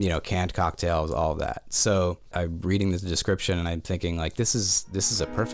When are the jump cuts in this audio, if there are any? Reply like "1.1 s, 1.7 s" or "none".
2.3 s